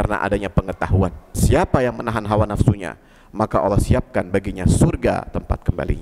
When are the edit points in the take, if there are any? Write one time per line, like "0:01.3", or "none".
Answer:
0:01.4